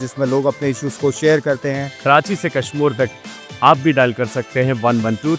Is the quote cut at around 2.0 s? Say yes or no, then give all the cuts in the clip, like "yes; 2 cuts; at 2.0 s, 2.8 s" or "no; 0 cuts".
yes; 1 cut; at 2.0 s